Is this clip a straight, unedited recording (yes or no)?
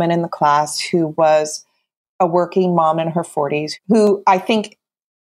no